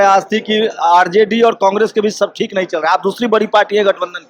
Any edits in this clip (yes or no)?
no